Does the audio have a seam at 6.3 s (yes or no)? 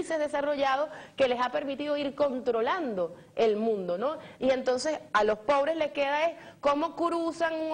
no